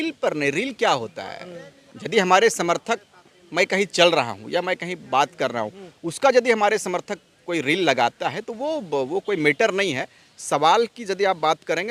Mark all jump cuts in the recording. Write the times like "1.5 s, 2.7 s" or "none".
none